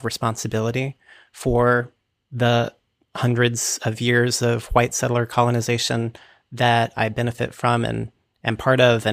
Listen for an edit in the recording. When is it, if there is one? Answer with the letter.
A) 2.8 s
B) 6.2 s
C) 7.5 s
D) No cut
D